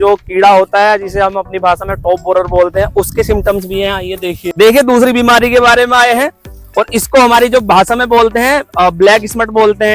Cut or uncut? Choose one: cut